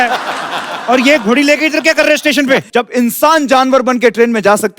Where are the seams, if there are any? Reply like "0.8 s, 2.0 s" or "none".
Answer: 2.7 s